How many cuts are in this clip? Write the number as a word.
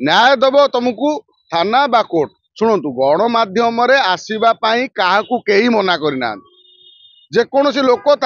one